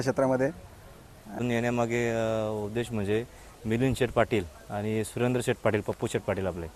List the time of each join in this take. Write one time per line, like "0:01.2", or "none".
0:01.4

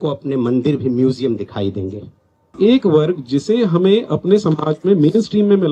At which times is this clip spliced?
0:02.5

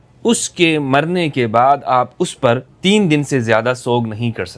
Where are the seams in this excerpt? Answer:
0:02.7

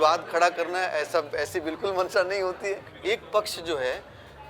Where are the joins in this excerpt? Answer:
0:02.9

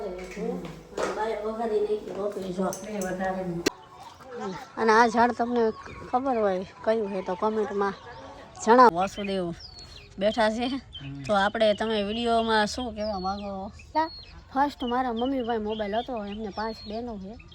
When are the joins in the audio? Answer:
0:03.7
0:08.9
0:13.9

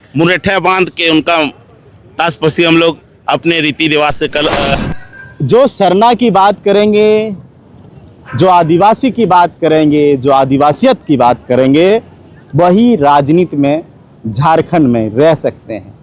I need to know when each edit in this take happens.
0:04.7

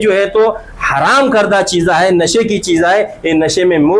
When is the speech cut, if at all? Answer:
none

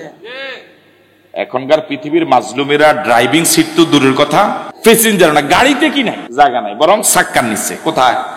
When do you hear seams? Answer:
0:04.7
0:06.2

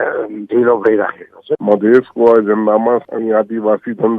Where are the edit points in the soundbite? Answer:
0:01.5
0:03.0

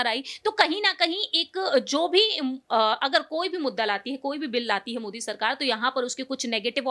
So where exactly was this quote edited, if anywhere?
none

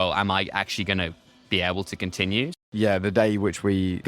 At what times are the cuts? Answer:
0:02.5

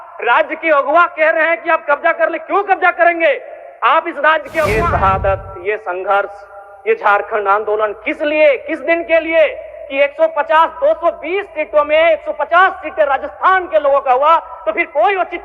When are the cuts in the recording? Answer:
0:04.7

